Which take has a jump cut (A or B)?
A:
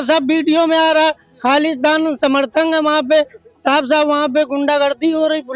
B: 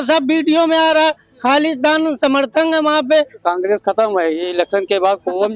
B